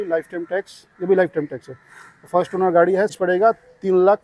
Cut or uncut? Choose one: cut